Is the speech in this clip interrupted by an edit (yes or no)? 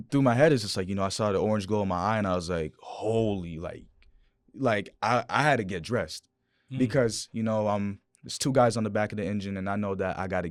no